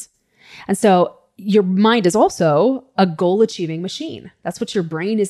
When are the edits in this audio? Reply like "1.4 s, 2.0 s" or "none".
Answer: none